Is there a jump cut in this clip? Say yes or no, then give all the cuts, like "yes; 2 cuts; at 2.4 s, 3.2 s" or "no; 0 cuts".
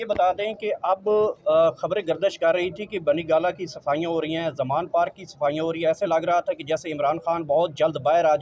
no; 0 cuts